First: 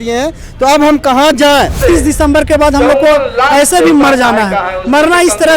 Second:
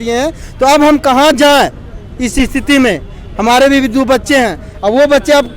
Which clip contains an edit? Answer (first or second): first